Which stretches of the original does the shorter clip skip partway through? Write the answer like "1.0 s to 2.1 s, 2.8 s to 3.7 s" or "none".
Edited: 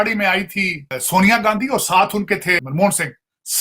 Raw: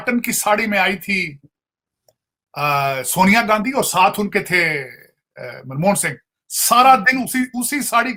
1.5 s to 3.0 s, 4.7 s to 5.7 s